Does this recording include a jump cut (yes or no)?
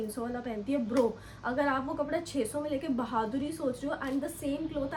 no